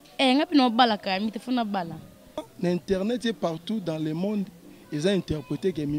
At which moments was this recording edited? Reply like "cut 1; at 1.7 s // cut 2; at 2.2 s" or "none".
cut 1; at 2.5 s

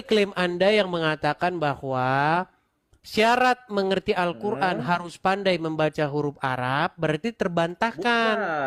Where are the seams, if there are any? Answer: none

